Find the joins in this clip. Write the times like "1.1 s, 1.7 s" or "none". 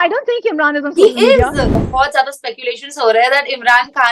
1.9 s